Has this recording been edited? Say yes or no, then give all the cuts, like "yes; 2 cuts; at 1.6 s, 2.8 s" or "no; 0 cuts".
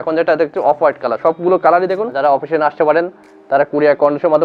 yes; 1 cut; at 2.1 s